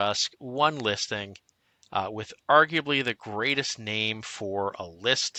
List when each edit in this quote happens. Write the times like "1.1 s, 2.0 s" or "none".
none